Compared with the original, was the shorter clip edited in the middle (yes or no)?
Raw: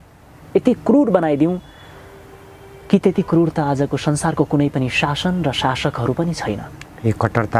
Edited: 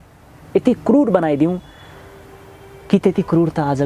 no